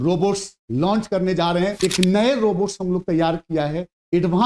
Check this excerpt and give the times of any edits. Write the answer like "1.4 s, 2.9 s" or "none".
1.7 s